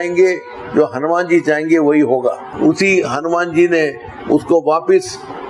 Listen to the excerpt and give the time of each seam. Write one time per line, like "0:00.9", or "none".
0:02.5

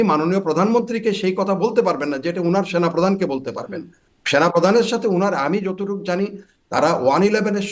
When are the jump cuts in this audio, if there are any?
none

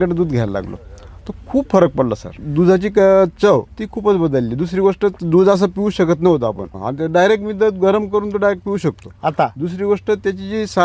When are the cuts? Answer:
0:02.4
0:03.7
0:06.7

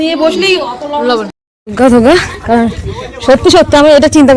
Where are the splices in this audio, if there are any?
0:01.5

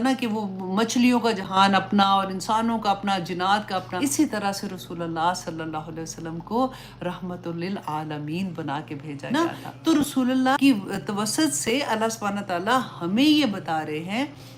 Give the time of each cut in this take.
0:03.9
0:09.2
0:10.5

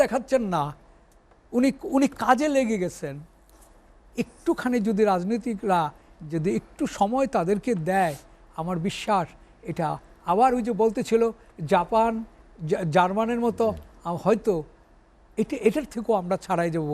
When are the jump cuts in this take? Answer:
none

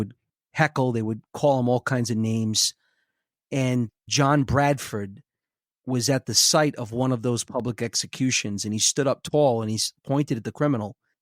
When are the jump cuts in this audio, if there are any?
0:04.0

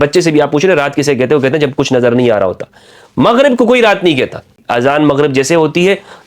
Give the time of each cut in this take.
0:04.6

